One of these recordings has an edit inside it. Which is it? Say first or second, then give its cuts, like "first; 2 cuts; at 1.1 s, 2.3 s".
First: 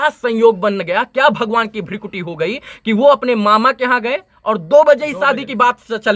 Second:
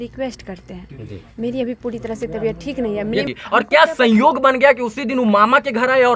second; 1 cut; at 3.3 s